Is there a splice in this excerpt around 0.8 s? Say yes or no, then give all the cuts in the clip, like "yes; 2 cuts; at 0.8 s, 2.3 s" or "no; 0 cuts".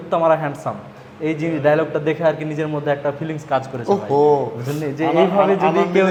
no; 0 cuts